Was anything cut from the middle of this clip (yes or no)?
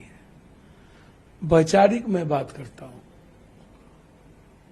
no